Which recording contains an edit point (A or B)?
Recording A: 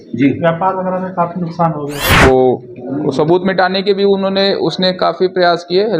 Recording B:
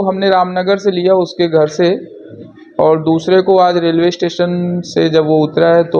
A